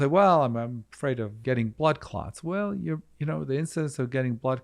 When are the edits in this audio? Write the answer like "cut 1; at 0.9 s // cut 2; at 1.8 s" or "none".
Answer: cut 1; at 1.4 s